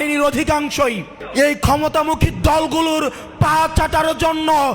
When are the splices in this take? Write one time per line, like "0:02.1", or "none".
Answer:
0:01.1